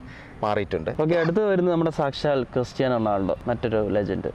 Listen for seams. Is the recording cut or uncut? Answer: uncut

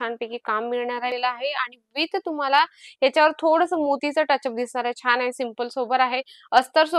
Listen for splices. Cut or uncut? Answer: cut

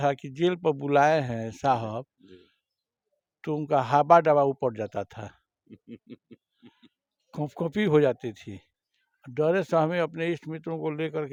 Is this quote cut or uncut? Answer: uncut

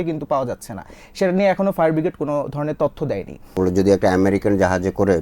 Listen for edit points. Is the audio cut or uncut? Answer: cut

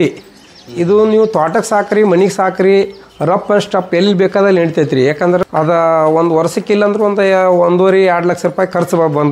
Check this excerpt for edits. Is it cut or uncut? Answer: cut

